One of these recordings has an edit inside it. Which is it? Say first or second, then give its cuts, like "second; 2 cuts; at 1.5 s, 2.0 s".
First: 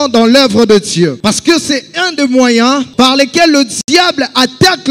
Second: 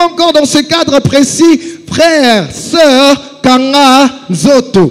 first; 2 cuts; at 1.2 s, 2.9 s